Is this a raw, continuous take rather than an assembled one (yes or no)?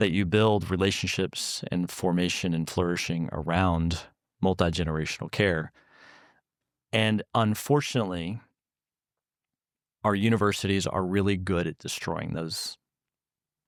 yes